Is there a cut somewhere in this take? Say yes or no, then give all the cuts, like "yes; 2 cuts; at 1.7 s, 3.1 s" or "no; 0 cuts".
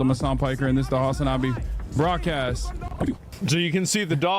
yes; 1 cut; at 3.3 s